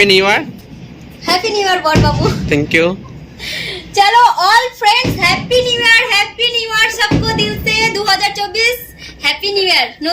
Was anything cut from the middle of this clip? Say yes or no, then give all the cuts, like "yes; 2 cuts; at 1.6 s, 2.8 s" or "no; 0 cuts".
no; 0 cuts